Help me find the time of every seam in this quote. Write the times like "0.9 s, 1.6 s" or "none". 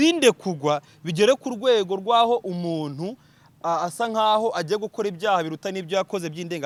none